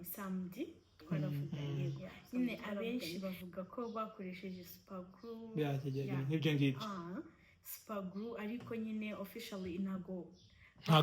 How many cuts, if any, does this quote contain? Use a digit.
1